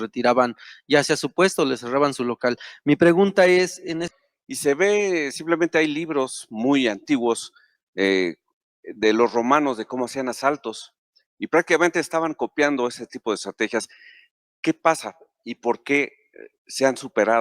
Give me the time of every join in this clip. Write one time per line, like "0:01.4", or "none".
0:04.1